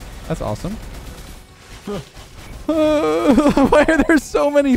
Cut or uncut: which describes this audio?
cut